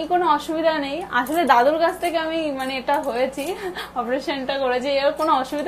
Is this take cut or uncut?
uncut